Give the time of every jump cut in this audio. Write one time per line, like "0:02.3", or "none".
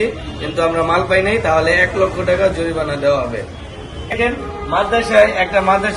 0:04.1